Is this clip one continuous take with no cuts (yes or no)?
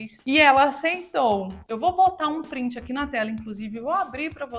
no